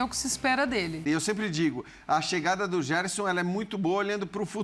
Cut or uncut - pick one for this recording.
cut